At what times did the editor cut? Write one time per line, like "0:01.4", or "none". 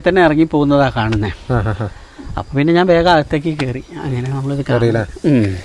none